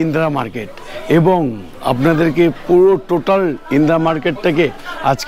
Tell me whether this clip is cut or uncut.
uncut